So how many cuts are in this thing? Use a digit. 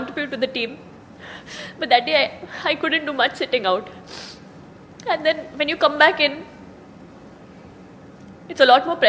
0